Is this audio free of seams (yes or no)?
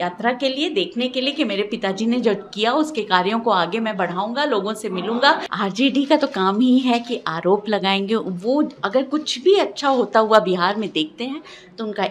no